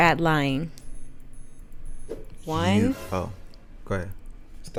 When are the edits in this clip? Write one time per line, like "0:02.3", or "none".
none